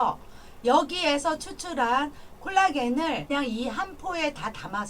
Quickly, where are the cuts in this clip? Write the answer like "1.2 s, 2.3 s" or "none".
3.2 s

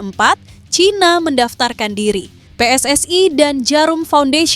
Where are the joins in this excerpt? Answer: 2.4 s

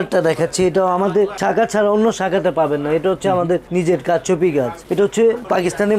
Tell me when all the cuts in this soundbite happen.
4.8 s

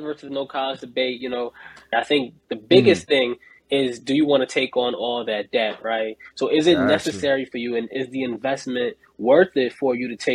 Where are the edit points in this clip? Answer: 1.9 s

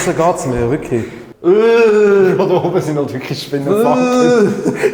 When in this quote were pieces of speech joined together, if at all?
1.2 s

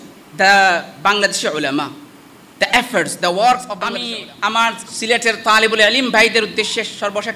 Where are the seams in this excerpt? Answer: 4.0 s

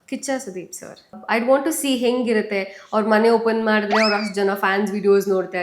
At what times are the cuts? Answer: 1.1 s

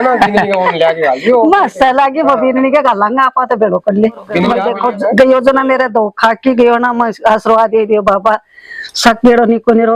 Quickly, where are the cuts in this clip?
4.7 s

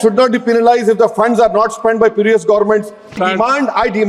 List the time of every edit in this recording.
3.2 s

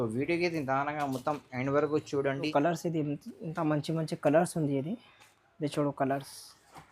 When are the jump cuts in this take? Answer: 2.5 s

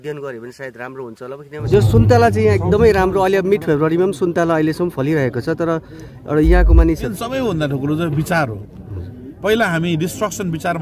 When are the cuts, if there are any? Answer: 1.7 s, 7.1 s

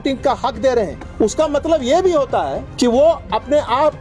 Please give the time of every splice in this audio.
1.0 s, 2.6 s

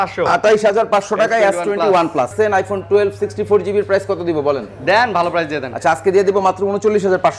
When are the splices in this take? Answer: 2.3 s

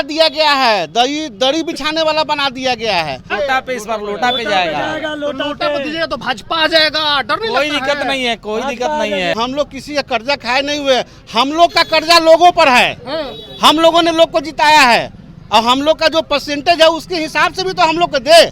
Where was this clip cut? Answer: 3.3 s, 9.4 s

